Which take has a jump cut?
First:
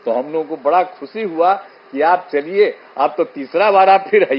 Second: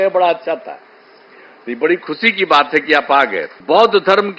second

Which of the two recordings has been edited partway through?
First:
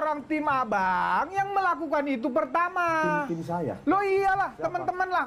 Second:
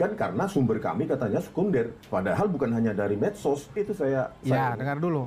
second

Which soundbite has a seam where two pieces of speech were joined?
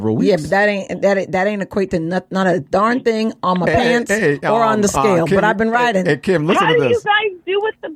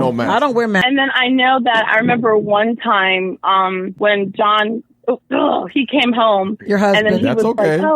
second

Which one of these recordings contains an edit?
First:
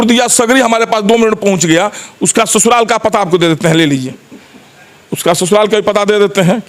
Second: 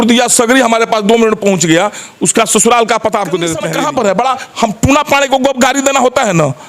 second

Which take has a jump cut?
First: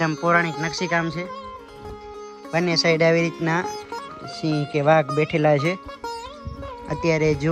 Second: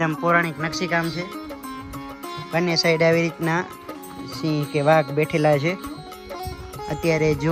first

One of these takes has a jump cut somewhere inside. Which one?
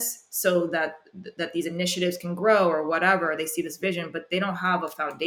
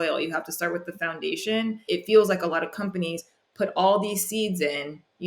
second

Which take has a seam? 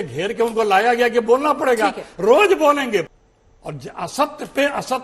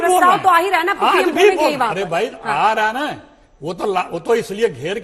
first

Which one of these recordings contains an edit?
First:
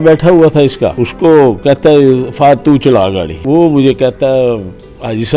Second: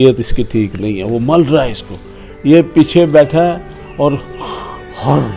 first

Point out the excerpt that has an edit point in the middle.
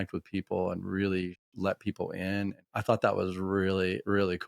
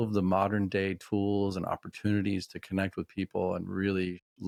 first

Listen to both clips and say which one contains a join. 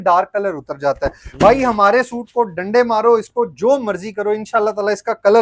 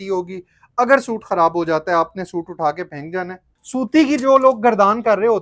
second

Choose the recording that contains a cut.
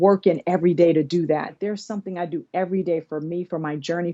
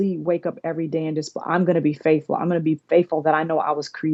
first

